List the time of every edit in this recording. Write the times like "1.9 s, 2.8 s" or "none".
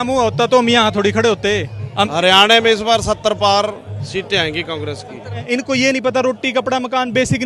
2.1 s, 5.4 s